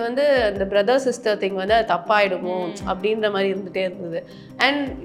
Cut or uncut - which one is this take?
uncut